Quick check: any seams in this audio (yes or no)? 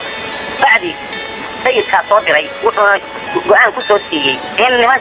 no